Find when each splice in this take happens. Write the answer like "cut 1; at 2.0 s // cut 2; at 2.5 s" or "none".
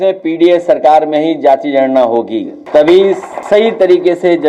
cut 1; at 2.6 s // cut 2; at 3.3 s